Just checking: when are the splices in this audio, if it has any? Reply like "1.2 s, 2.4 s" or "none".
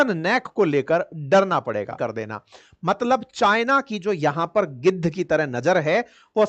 2.0 s